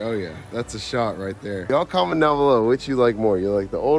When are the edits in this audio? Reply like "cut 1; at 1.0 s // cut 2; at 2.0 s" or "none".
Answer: cut 1; at 1.7 s